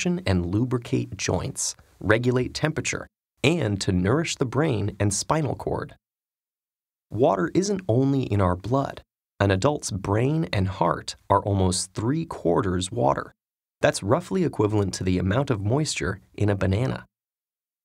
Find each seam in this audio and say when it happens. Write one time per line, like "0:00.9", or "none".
0:04.4

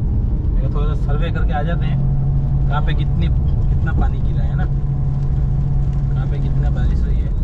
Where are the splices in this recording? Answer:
none

